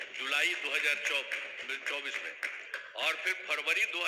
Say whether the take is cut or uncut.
uncut